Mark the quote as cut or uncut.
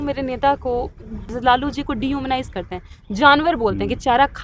cut